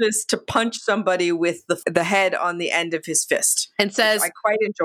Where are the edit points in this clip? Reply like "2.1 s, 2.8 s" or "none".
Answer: 1.8 s